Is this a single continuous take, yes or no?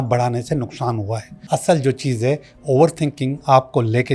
no